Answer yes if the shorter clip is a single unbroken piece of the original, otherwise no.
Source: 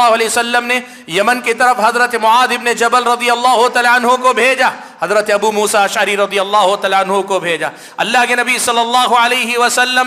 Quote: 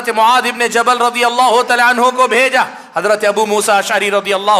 yes